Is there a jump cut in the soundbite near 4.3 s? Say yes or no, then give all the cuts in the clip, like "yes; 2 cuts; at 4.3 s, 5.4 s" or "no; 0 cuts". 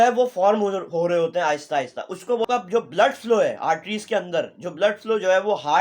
no; 1 cut; at 2.4 s